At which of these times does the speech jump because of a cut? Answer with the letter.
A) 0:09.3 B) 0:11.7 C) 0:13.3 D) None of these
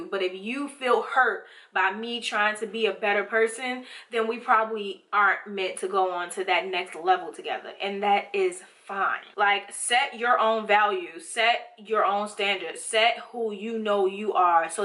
A